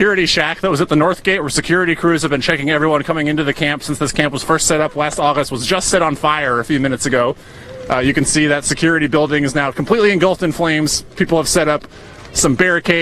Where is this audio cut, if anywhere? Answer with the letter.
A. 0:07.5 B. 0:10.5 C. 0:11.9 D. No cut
B